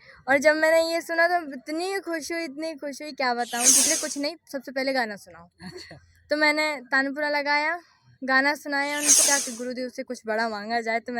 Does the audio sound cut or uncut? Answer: cut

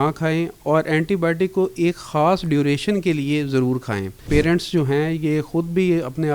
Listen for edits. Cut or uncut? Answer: cut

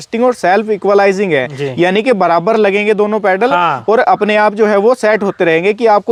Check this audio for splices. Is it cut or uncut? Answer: uncut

